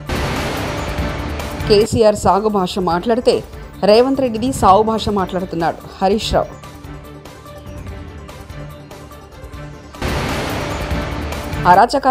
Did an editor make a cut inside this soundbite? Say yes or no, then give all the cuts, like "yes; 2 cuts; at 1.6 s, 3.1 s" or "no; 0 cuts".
no; 0 cuts